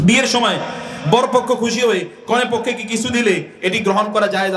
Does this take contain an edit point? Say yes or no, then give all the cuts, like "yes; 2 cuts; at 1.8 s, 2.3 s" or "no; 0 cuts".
no; 0 cuts